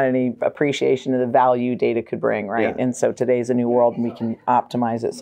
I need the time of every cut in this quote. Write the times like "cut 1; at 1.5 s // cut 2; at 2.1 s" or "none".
none